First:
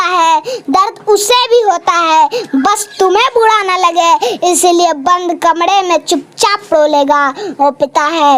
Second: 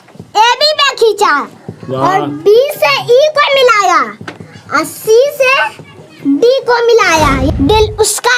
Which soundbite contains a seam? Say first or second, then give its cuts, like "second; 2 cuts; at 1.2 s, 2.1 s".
second; 1 cut; at 7.5 s